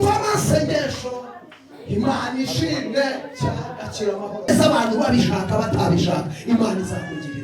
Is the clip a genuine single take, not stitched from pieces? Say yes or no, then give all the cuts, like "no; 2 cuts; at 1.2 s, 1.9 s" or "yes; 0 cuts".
no; 1 cut; at 4.5 s